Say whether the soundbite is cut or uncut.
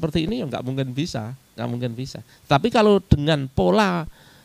cut